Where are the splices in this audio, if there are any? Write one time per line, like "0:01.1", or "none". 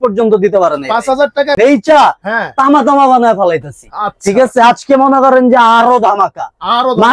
0:01.5